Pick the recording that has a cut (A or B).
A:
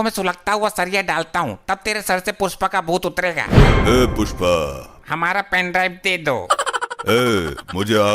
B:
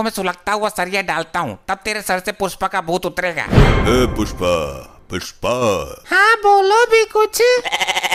A